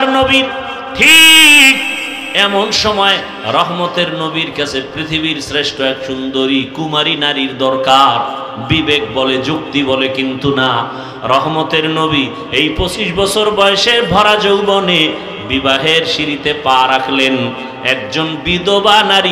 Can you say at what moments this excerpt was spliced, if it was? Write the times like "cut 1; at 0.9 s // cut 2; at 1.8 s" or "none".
none